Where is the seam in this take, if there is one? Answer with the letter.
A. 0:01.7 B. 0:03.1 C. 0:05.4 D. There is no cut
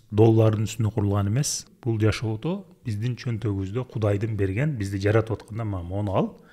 A